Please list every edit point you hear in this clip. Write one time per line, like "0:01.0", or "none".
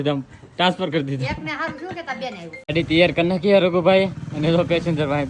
0:02.7